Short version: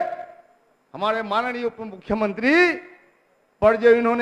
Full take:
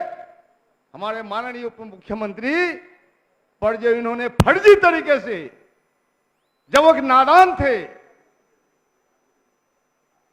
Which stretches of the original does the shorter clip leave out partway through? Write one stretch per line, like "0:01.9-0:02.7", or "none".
none